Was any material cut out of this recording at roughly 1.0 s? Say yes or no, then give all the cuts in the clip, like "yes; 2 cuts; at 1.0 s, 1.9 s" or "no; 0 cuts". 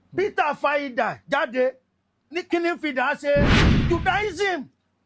no; 1 cut; at 3.7 s